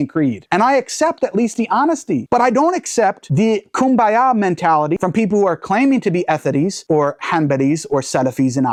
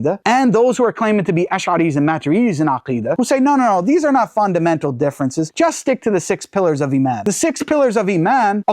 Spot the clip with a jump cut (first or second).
second